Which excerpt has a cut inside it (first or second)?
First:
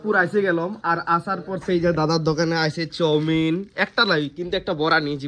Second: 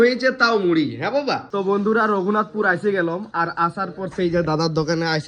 second